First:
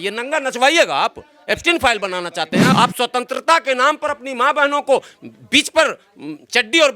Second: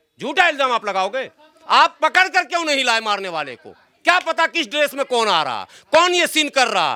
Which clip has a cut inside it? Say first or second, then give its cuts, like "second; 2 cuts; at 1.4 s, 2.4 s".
first; 1 cut; at 2.7 s